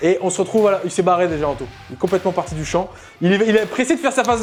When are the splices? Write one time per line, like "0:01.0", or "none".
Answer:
none

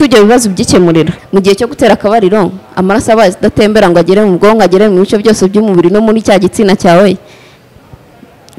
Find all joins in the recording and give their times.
0:01.2

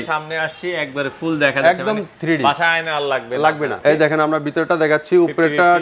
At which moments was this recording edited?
0:03.8

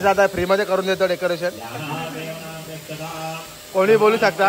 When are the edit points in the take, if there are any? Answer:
none

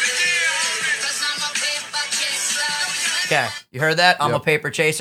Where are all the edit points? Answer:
none

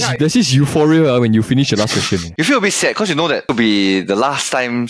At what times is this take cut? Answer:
0:02.3
0:03.5

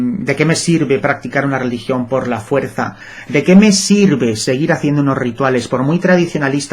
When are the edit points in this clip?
0:03.1

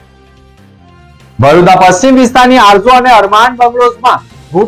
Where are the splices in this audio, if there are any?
none

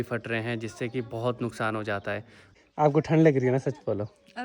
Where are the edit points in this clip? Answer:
0:02.4

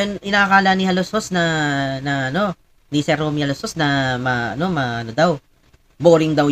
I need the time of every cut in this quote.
none

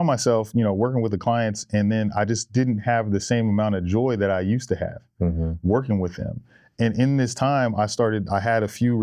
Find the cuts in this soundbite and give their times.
none

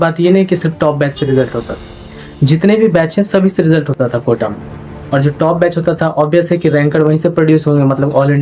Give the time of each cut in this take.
none

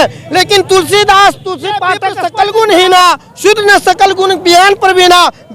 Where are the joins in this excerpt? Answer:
0:02.0

